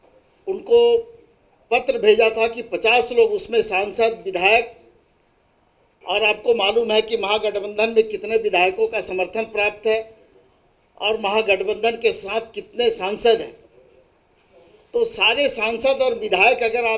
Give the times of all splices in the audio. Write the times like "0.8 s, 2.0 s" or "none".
none